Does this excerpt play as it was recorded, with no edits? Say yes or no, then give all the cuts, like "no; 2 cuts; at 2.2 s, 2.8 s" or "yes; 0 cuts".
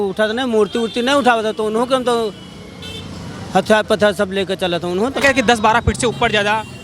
no; 1 cut; at 5.2 s